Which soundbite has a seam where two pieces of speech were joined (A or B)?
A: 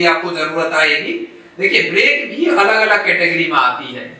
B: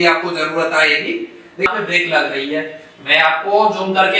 B